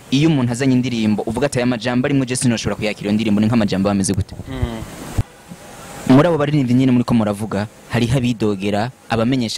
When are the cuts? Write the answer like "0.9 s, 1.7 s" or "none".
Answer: 5.2 s